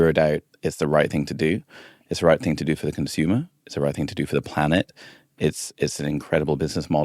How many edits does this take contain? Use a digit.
0